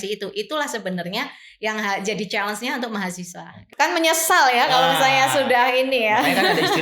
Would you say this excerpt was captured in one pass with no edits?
no; 1 cut; at 3.6 s

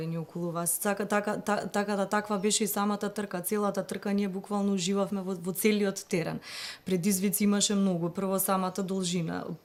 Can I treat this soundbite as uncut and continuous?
yes; 0 cuts

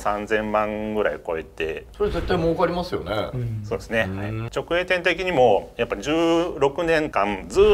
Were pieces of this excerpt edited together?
yes; 2 cuts; at 1.8 s, 4.4 s

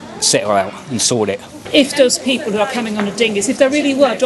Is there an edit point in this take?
yes; 1 cut; at 1.6 s

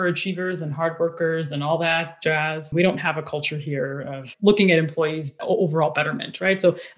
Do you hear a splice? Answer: yes; 2 cuts; at 2.7 s, 5.4 s

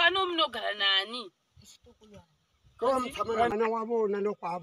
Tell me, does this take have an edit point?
yes; 1 cut; at 3.5 s

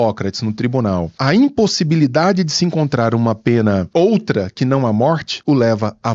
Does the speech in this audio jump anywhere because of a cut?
yes; 3 cuts; at 1.2 s, 3.9 s, 5.3 s

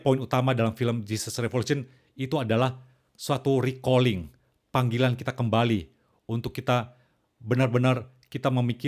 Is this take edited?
no; 0 cuts

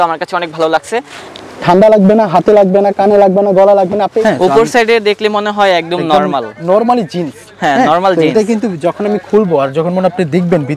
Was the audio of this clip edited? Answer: yes; 2 cuts; at 1.2 s, 4.2 s

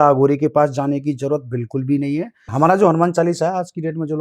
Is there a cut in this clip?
yes; 1 cut; at 2.4 s

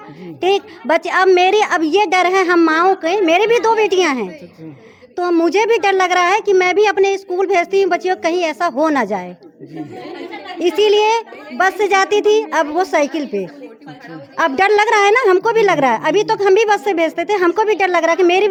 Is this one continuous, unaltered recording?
yes; 0 cuts

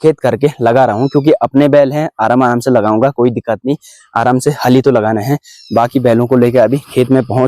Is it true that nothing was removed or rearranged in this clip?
yes; 0 cuts

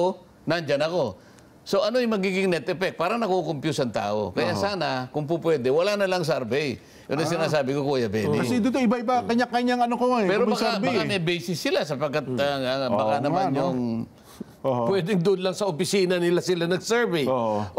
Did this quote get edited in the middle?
no; 0 cuts

